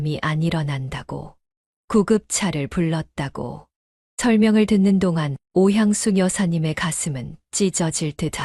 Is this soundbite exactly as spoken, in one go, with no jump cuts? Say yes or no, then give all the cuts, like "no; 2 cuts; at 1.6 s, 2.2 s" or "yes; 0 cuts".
yes; 0 cuts